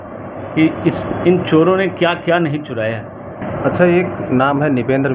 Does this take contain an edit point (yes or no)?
yes